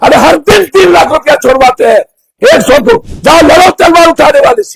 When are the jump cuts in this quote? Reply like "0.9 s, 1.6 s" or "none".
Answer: 3.1 s

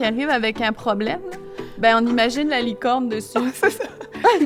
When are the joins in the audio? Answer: none

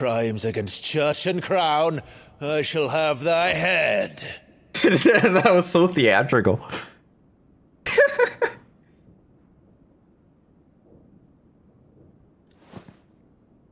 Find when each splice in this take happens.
none

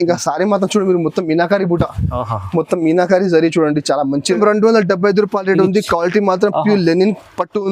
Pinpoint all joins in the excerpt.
4.4 s

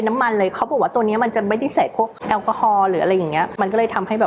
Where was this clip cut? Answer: none

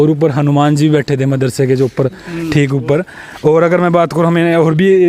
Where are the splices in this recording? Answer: none

